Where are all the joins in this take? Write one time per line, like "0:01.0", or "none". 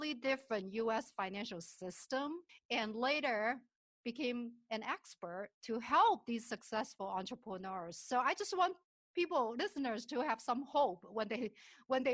0:02.5